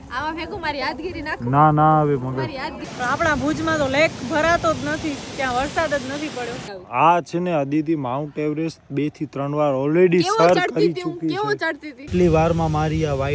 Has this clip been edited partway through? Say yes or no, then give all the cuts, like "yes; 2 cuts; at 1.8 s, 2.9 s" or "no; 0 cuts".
yes; 3 cuts; at 2.8 s, 6.7 s, 12.1 s